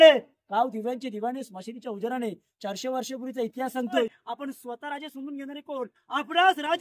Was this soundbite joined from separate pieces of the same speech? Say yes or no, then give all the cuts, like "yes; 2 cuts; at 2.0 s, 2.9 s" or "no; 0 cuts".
yes; 1 cut; at 4.2 s